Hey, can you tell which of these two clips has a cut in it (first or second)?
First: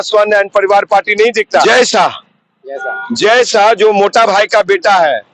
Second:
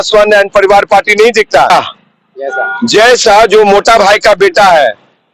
second